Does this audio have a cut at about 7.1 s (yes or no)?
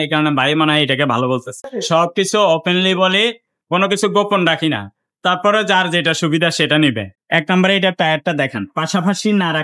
yes